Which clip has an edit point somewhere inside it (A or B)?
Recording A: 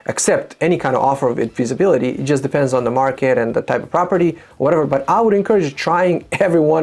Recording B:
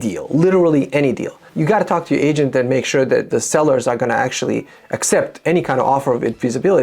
B